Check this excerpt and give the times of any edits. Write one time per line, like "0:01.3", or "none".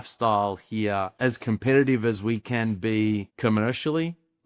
0:01.1
0:03.3